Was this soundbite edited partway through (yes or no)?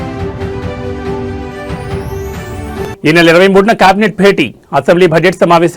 yes